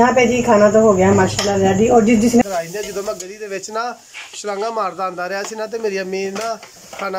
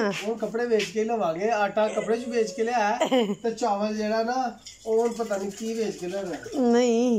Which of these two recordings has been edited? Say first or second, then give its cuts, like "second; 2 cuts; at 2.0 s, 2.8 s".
first; 1 cut; at 2.4 s